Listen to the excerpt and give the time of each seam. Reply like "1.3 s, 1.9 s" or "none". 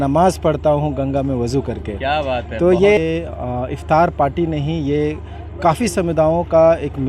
3.0 s